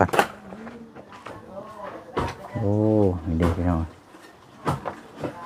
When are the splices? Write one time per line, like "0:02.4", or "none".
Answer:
none